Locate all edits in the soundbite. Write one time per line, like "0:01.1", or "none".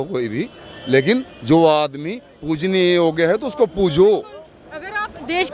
none